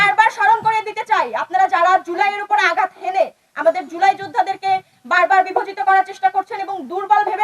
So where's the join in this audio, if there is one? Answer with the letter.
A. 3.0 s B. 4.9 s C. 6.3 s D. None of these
D